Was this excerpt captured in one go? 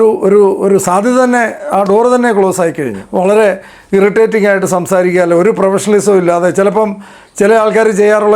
no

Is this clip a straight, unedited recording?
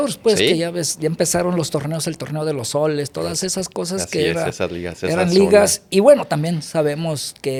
yes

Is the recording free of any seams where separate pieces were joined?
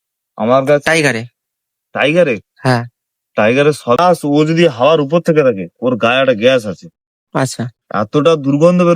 no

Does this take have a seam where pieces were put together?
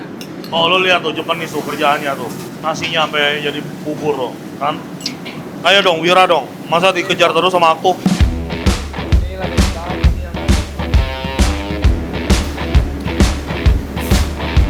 no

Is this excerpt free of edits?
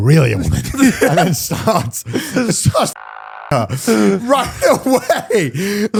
yes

